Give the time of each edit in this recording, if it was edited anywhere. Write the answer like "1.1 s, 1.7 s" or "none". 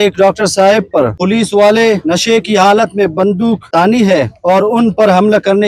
1.2 s, 2.0 s, 3.6 s, 4.3 s

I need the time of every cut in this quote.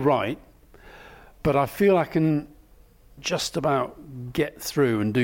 3.1 s

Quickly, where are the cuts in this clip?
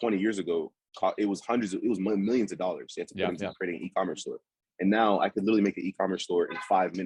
none

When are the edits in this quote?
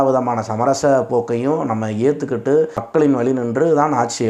2.9 s

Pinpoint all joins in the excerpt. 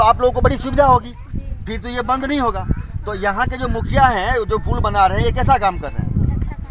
none

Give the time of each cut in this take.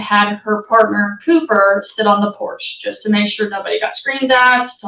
none

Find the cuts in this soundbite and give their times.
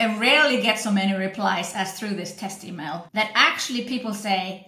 3.1 s

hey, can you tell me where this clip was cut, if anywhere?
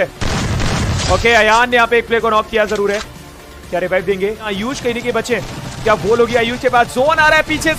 4.5 s

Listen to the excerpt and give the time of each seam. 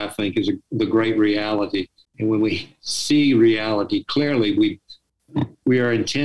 2.0 s

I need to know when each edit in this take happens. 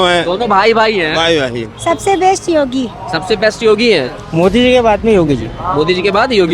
1.7 s, 4.2 s

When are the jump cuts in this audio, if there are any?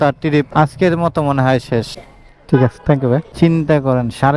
1.9 s, 3.3 s

